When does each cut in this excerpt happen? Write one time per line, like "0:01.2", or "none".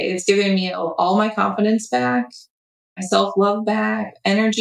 none